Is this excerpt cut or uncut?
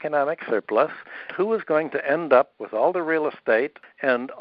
cut